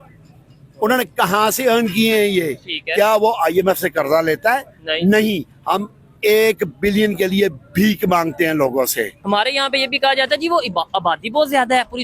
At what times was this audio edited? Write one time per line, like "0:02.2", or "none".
0:09.2

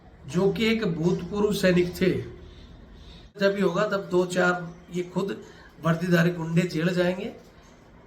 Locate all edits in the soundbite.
0:03.4

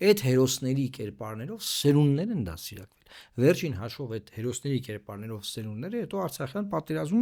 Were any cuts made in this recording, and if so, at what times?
none

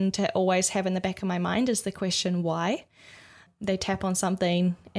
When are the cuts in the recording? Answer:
0:03.5

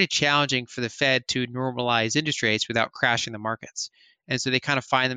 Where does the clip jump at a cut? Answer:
none

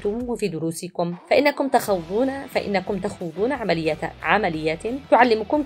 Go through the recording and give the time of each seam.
none

